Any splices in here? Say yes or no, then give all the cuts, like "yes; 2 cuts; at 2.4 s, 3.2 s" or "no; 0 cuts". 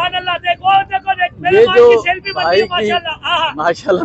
no; 0 cuts